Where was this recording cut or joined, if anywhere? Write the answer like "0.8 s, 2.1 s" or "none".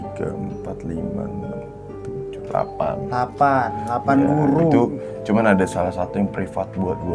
none